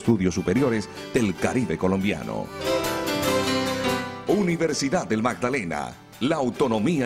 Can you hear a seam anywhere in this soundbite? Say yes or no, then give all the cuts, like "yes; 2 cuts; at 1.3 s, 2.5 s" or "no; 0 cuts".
yes; 2 cuts; at 2.5 s, 4.1 s